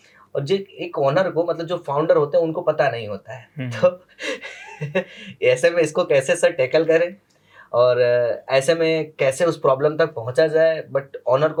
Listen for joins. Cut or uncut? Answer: uncut